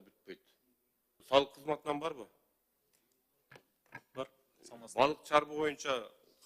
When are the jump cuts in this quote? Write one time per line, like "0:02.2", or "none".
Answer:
0:01.1